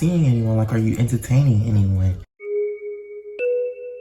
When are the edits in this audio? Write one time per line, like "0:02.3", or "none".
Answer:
none